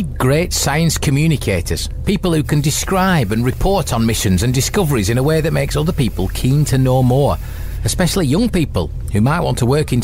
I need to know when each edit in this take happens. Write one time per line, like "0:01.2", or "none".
none